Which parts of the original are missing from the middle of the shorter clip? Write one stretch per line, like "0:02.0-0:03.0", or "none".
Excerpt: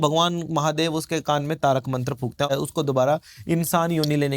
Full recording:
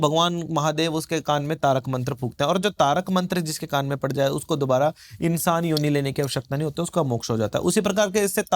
0:02.5-0:04.2